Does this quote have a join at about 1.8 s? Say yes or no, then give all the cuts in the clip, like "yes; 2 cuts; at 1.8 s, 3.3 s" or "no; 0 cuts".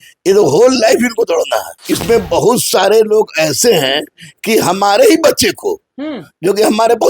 yes; 1 cut; at 1.8 s